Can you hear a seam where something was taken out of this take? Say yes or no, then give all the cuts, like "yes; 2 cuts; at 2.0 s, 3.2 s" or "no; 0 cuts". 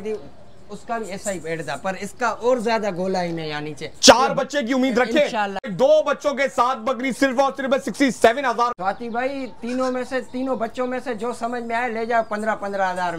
yes; 2 cuts; at 5.7 s, 8.8 s